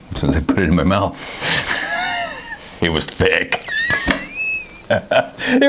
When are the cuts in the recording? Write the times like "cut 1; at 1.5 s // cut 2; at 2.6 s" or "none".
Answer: none